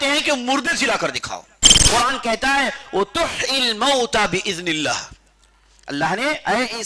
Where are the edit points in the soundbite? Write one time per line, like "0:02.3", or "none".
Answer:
0:01.8